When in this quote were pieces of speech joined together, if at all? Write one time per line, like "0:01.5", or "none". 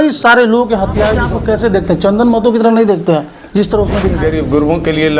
0:01.3
0:04.1

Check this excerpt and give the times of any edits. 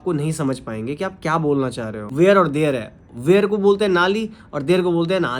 0:02.0

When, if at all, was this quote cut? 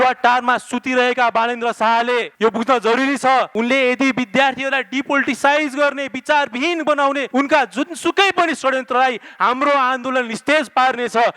0:02.3
0:03.5
0:07.2

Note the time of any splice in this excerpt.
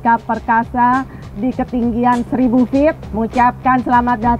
0:02.3
0:03.1

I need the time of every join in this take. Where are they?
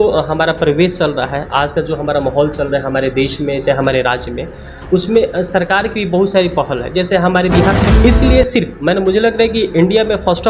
0:07.8

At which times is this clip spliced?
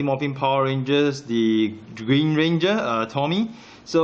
0:01.8

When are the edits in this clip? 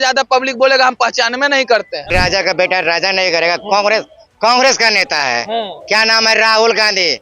0:02.1

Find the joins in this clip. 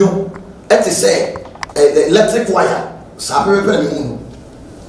none

